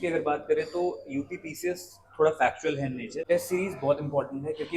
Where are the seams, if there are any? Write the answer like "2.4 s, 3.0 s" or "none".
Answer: 3.1 s